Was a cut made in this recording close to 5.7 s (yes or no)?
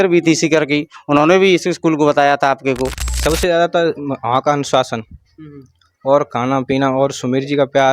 no